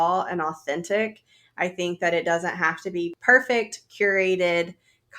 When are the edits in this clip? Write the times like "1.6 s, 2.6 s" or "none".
3.2 s